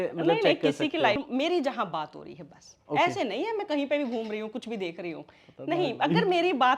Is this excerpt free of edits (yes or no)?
no